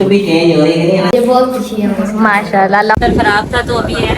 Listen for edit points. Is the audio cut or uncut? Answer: cut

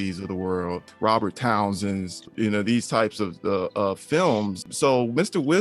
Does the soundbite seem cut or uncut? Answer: cut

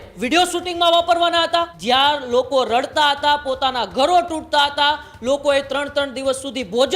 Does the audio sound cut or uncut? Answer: cut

